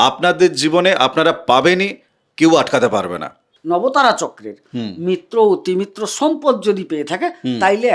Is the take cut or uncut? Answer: cut